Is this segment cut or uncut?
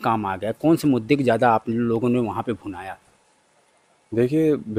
uncut